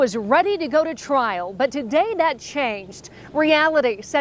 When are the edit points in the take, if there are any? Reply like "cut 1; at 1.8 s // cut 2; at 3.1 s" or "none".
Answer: none